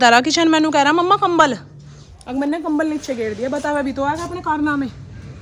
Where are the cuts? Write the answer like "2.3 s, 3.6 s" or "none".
none